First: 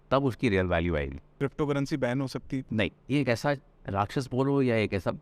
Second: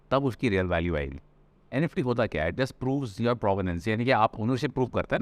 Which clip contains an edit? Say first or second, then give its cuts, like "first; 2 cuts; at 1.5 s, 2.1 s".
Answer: first; 2 cuts; at 1.2 s, 3.0 s